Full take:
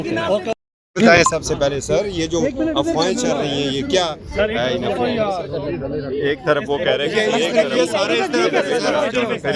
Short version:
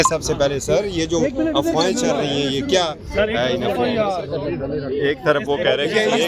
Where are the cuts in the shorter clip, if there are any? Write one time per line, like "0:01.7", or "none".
none